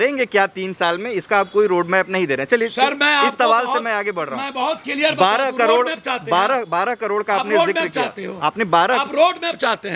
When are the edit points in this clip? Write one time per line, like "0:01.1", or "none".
none